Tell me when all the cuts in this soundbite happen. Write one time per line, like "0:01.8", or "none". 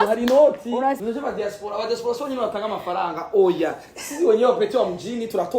0:01.0